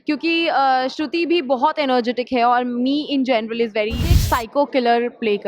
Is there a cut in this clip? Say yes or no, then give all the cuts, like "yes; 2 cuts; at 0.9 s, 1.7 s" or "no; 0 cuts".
yes; 1 cut; at 4.1 s